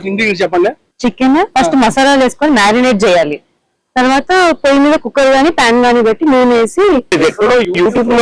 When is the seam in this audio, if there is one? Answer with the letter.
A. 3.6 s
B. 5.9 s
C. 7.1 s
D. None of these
C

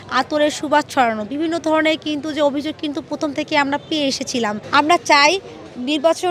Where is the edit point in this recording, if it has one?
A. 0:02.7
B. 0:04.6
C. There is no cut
B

